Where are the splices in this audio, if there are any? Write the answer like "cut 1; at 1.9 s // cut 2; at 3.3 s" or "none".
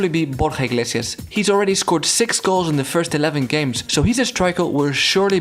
cut 1; at 1.2 s // cut 2; at 3.8 s